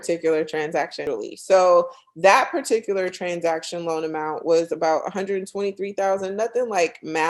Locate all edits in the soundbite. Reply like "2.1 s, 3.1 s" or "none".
1.0 s